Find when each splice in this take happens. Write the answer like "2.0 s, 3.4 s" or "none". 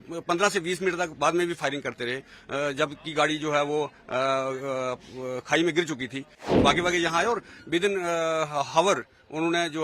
6.4 s